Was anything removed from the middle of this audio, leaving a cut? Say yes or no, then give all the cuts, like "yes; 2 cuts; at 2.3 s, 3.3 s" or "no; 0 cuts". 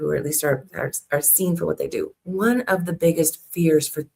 yes; 1 cut; at 2.2 s